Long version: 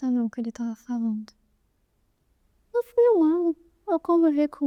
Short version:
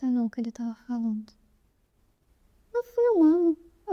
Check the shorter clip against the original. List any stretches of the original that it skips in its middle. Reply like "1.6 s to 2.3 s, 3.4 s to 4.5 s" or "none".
none